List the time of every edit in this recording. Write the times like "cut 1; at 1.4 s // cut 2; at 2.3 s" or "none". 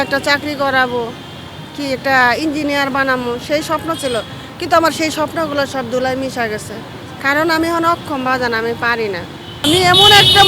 cut 1; at 9.5 s